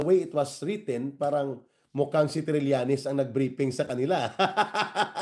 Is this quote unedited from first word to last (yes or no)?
yes